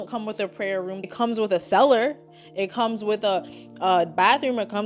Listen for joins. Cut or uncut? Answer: cut